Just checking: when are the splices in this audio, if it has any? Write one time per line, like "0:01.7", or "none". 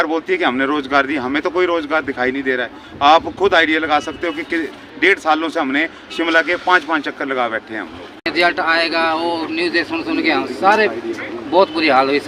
0:08.3